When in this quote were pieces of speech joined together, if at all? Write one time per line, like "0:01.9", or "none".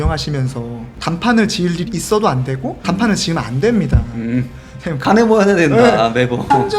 0:05.1